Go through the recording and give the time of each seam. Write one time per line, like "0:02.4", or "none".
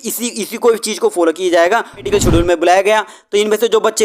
0:02.1